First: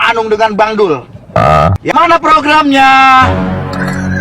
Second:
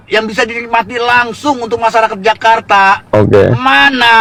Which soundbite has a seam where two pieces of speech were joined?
first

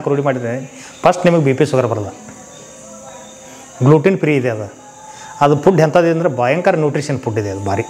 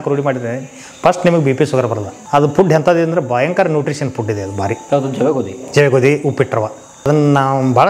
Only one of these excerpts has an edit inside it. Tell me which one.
second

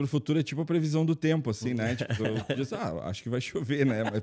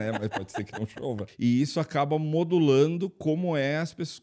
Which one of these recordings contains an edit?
second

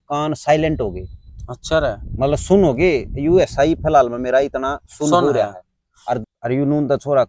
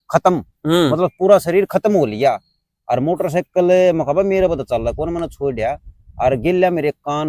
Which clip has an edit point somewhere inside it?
first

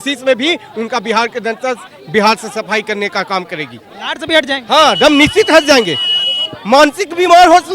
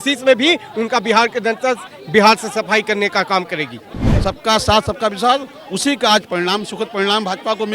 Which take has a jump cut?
second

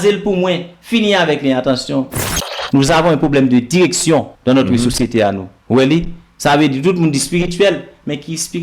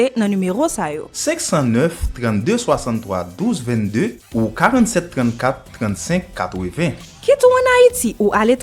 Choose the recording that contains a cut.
first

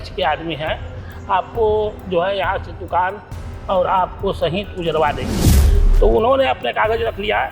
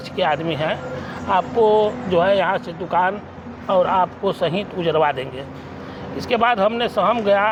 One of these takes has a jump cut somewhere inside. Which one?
first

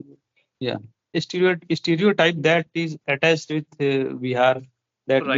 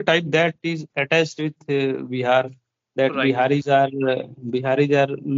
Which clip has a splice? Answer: first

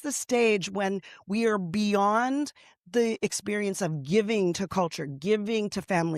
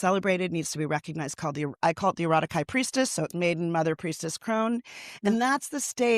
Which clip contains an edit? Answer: second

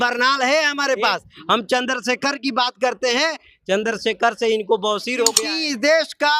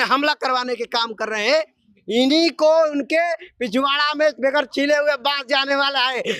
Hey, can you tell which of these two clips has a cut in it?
first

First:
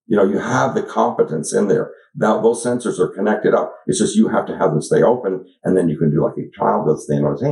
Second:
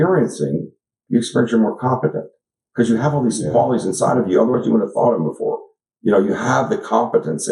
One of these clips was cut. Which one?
second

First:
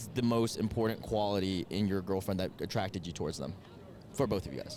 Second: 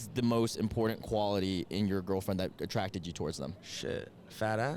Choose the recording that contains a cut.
second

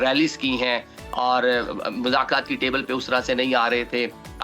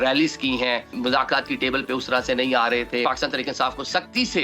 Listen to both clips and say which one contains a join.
second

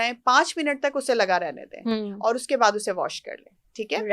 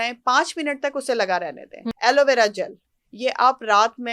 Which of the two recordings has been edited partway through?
second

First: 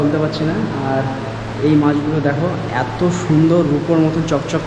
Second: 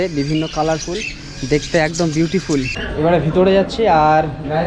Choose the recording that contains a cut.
second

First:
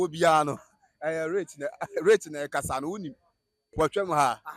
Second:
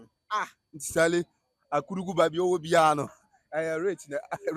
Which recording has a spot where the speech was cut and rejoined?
first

